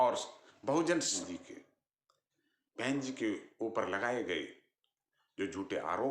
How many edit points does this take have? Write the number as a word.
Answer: one